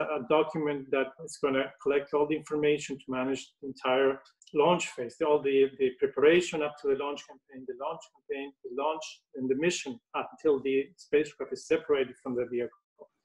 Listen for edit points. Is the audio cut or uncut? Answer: cut